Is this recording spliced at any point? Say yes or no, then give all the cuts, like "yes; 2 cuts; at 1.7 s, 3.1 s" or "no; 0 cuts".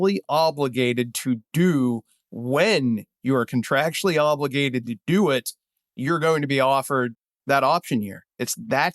yes; 1 cut; at 7.3 s